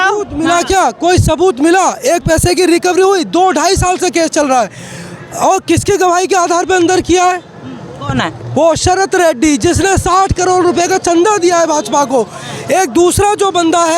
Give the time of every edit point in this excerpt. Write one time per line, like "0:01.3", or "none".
none

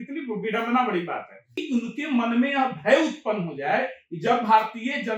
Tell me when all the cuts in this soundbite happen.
0:01.6

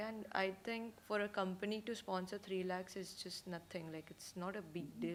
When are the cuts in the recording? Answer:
none

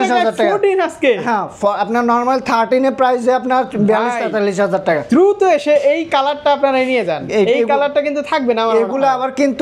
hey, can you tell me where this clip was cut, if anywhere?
none

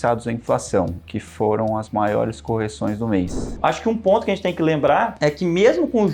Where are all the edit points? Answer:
0:03.5
0:05.1

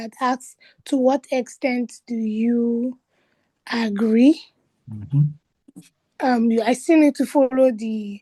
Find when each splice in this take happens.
none

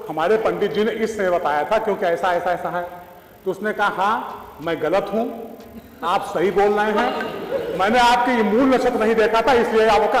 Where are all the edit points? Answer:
none

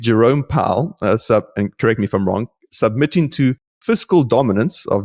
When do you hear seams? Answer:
none

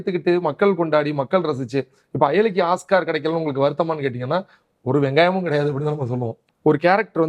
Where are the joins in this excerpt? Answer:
0:06.4

